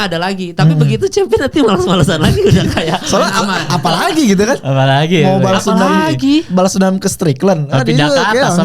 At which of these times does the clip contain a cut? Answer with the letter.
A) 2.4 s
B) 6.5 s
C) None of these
C